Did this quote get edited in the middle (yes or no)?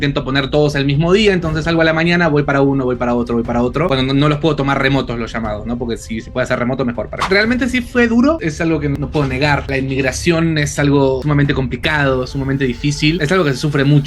yes